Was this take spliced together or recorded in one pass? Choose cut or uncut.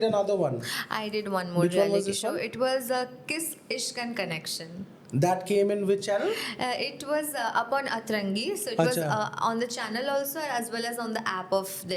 uncut